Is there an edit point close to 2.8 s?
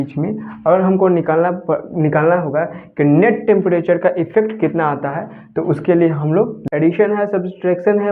no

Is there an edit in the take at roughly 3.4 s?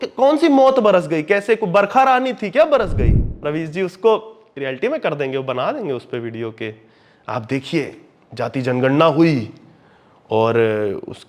yes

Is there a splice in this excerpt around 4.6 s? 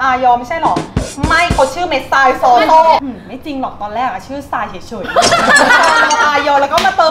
no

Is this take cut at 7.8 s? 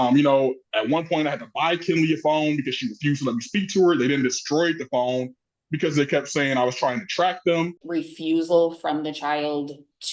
yes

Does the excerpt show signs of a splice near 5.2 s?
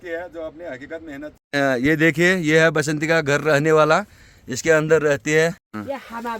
yes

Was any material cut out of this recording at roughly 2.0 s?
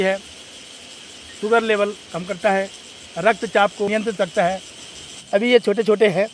no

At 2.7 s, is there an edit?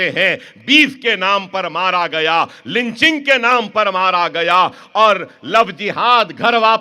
no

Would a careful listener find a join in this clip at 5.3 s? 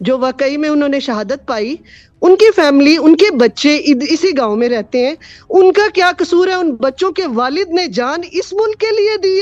no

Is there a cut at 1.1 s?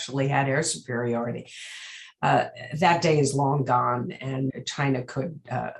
no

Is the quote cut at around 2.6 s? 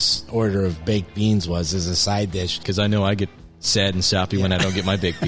yes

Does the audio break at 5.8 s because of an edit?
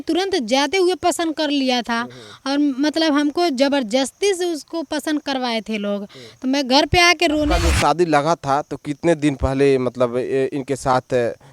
no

